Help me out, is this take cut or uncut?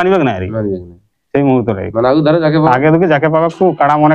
uncut